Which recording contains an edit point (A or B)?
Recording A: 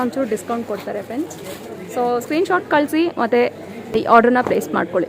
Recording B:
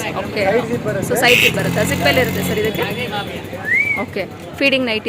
A